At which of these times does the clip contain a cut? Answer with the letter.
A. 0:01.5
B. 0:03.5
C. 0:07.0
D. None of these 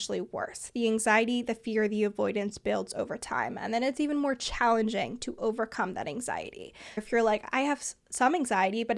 C